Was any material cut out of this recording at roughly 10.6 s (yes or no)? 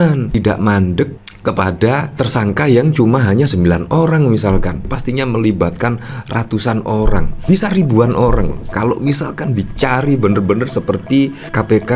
no